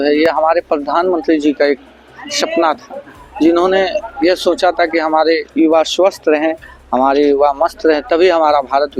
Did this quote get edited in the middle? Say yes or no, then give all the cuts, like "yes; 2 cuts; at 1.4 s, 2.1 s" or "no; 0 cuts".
no; 0 cuts